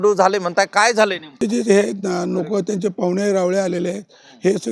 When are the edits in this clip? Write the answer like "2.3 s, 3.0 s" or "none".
1.4 s